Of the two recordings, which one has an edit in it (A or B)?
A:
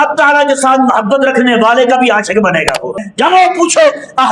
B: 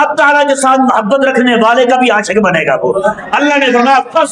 A